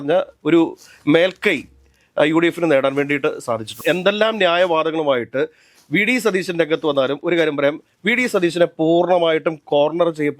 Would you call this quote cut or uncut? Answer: cut